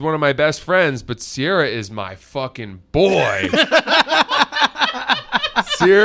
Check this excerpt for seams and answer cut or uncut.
uncut